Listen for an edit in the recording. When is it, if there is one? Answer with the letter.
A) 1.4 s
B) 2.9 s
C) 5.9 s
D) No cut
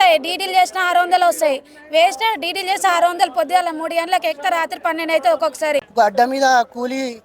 C